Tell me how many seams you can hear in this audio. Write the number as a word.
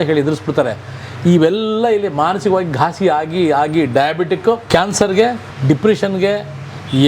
two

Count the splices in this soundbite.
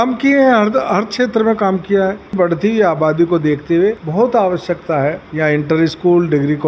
three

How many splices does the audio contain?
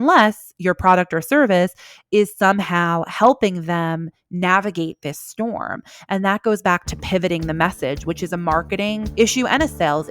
one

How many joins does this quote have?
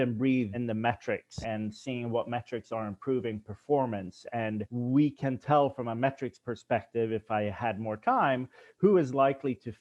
two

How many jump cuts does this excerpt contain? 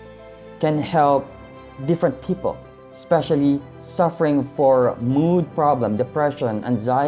zero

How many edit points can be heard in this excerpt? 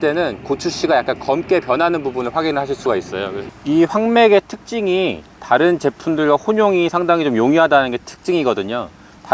one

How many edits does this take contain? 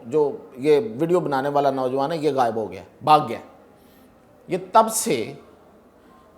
zero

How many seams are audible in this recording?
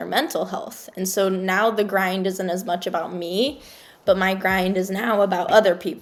zero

